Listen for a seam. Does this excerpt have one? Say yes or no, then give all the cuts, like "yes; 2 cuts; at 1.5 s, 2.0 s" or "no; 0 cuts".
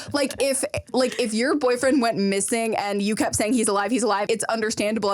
yes; 1 cut; at 4.2 s